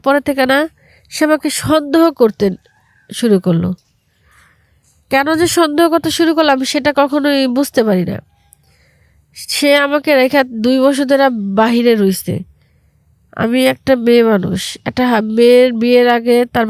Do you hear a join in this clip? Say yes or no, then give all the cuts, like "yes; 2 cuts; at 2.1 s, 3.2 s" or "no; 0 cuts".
no; 0 cuts